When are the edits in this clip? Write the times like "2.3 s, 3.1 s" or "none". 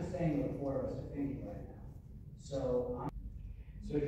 3.1 s